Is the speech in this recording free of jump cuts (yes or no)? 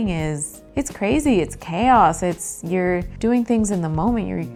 yes